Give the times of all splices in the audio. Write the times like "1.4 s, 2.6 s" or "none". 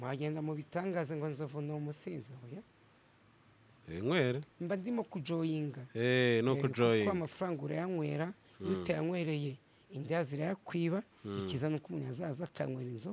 none